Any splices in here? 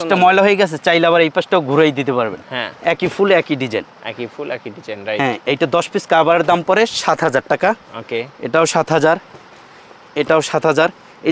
no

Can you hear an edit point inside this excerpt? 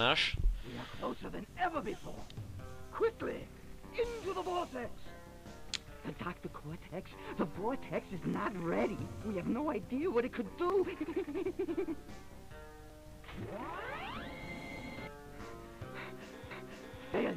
no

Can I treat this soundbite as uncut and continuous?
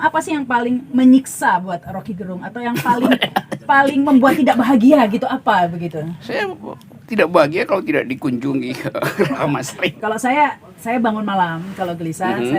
no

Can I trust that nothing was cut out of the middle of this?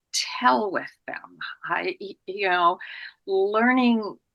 yes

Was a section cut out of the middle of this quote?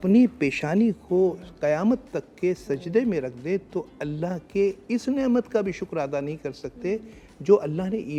no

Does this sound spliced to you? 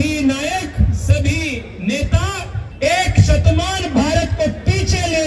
yes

